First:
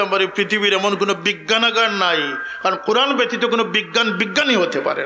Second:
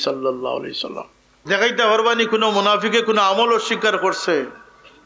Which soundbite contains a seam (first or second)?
second